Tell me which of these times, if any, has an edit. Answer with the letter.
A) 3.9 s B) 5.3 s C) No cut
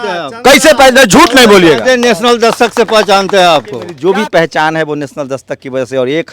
A